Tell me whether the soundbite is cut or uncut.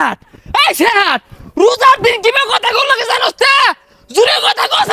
uncut